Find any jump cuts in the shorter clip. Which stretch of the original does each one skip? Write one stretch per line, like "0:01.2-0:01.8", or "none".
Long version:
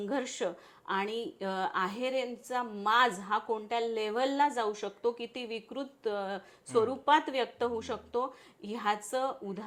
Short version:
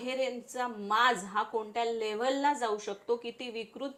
none